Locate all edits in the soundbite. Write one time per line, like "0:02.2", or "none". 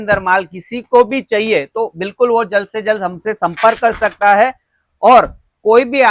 none

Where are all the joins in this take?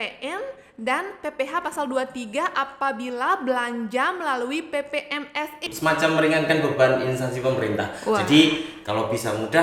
0:05.6

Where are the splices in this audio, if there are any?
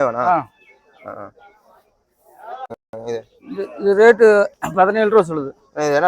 0:02.7

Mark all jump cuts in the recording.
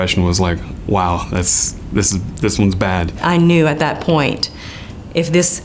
0:03.2

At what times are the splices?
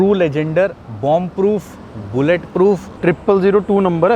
0:02.9

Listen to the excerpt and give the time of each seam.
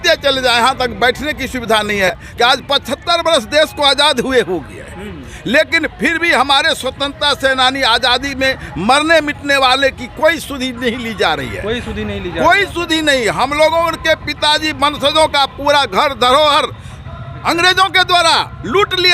0:02.1

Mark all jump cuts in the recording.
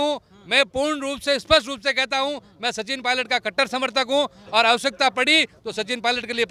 none

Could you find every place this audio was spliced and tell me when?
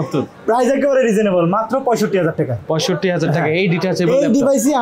none

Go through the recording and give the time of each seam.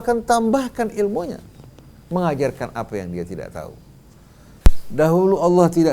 0:04.5

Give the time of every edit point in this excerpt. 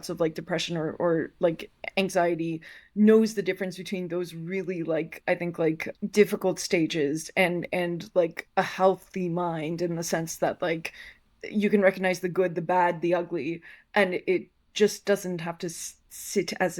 none

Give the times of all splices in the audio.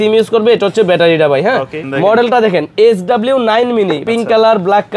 0:01.8
0:04.0

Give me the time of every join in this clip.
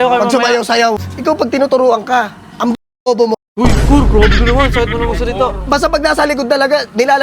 0:01.1

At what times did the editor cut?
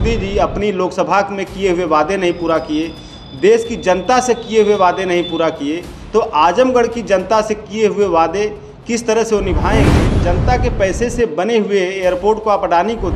0:10.1

